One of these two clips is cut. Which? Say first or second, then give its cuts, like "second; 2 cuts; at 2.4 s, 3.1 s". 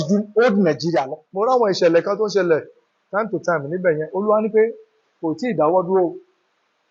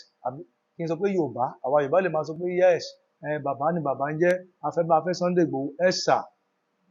first; 1 cut; at 1.2 s